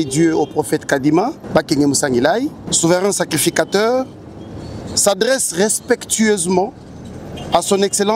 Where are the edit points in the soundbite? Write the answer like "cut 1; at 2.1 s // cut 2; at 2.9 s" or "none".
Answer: cut 1; at 1.4 s // cut 2; at 2.6 s